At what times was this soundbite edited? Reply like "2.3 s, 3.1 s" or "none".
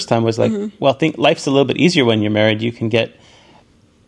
none